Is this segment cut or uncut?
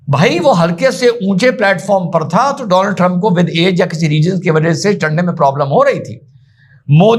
uncut